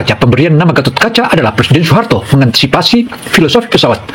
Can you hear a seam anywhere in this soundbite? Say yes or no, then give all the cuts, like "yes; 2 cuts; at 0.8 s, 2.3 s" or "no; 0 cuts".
no; 0 cuts